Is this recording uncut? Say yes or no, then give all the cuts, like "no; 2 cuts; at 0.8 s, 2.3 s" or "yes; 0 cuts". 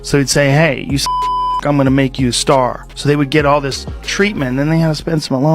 no; 1 cut; at 2.9 s